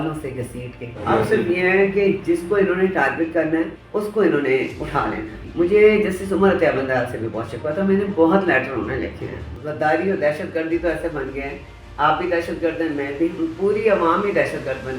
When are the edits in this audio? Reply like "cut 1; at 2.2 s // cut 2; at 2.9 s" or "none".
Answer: cut 1; at 1.0 s // cut 2; at 3.8 s // cut 3; at 5.4 s // cut 4; at 9.6 s

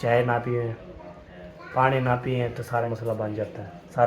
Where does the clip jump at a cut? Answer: cut 1; at 2.8 s

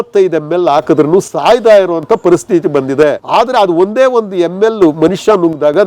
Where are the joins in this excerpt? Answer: cut 1; at 3.2 s

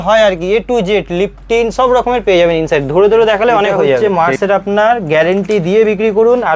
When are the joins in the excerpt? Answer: cut 1; at 4.0 s

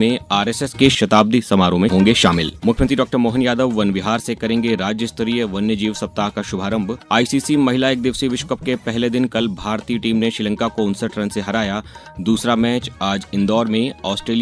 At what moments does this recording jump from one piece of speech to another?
cut 1; at 2.5 s // cut 2; at 7.0 s

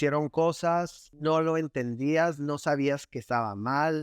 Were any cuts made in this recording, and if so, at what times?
cut 1; at 1.0 s

